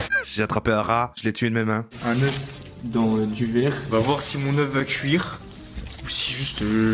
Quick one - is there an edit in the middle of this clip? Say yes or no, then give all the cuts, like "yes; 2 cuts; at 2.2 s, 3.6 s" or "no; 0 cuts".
yes; 1 cut; at 3.9 s